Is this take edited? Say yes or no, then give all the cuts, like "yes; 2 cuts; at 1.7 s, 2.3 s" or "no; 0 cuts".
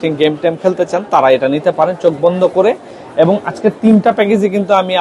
no; 0 cuts